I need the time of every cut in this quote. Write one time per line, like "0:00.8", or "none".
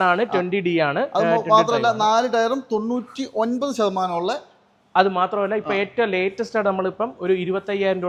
none